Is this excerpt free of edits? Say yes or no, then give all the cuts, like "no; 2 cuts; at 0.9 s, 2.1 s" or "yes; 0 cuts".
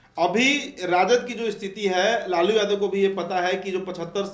yes; 0 cuts